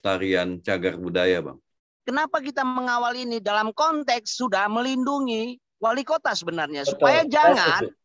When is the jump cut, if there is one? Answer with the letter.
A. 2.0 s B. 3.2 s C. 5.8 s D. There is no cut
A